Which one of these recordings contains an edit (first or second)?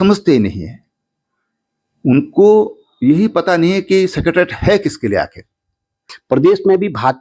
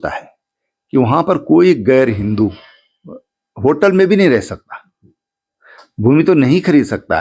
first